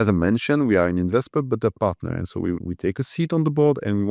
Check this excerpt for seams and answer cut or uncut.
uncut